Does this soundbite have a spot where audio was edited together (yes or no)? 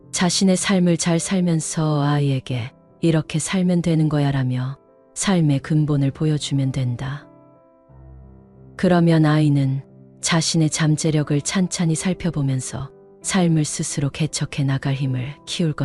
no